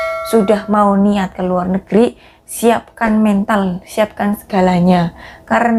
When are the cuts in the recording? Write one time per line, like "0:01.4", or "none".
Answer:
none